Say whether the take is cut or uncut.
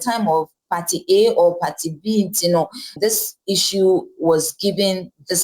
cut